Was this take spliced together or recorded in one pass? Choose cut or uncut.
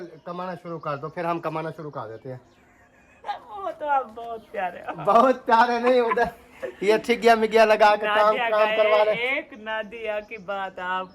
uncut